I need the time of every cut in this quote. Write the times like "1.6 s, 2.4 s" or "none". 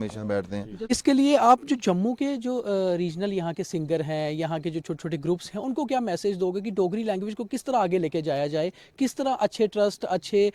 0.9 s